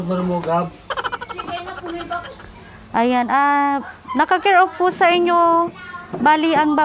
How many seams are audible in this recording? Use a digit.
0